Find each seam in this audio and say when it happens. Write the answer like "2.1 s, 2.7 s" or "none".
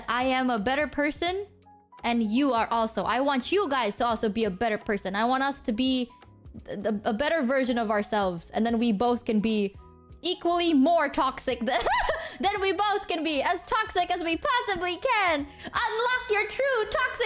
none